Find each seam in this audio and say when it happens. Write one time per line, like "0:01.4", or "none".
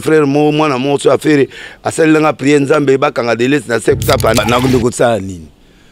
0:04.4

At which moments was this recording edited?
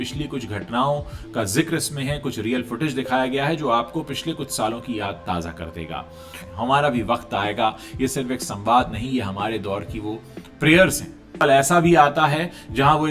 0:06.4
0:11.4

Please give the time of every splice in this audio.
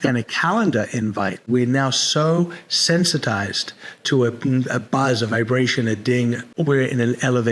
0:01.5
0:06.5

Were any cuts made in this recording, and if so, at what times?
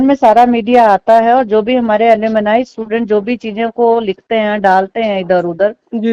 none

